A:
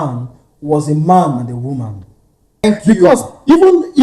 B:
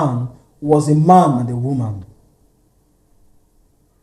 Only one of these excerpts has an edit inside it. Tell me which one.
A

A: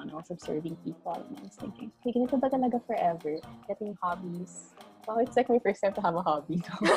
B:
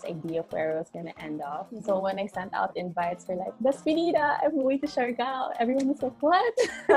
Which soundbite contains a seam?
A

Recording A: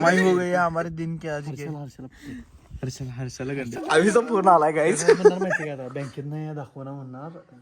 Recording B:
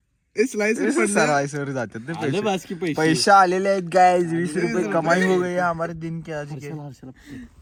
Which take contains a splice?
A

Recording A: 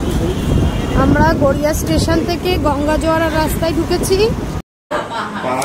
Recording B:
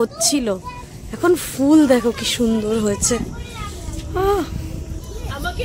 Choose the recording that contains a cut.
A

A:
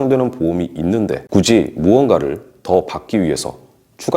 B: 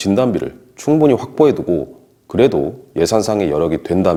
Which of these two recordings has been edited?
A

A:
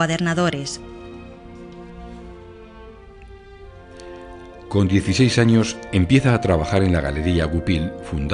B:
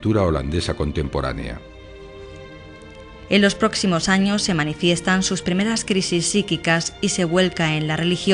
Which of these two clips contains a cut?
B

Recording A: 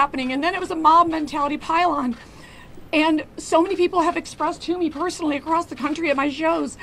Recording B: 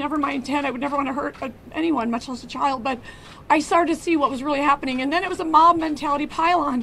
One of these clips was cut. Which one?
B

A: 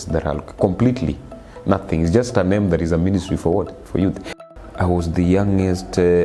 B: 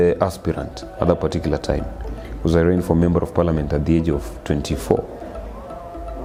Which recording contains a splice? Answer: A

